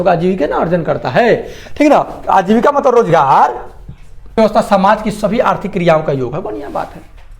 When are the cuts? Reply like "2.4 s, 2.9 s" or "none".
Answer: 4.4 s